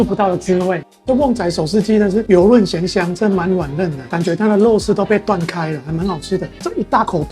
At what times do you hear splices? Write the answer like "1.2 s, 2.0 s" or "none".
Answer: 0.9 s, 4.0 s